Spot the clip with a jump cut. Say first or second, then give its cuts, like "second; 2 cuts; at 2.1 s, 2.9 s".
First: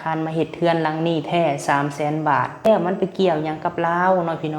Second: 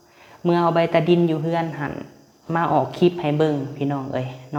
first; 1 cut; at 2.7 s